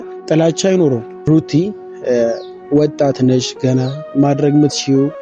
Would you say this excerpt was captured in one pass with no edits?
no; 1 cut; at 1.2 s

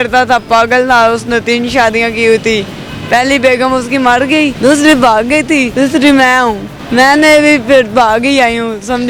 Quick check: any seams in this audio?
yes; 3 cuts; at 4.5 s, 5.7 s, 6.7 s

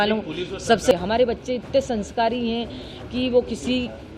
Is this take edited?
yes; 1 cut; at 0.9 s

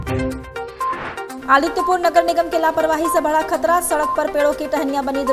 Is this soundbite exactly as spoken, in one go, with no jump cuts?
no; 1 cut; at 1.3 s

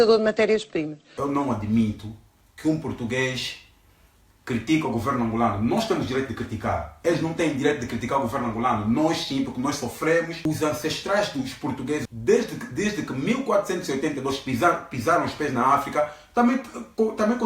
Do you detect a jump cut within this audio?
yes; 3 cuts; at 1.0 s, 10.5 s, 12.1 s

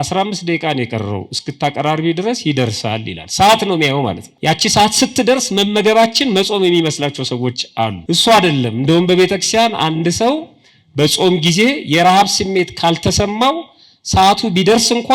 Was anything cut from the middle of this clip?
yes; 2 cuts; at 4.3 s, 8.0 s

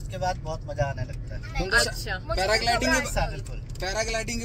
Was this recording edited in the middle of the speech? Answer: no; 0 cuts

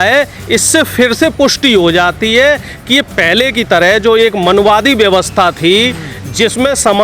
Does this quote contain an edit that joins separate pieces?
yes; 1 cut; at 3.1 s

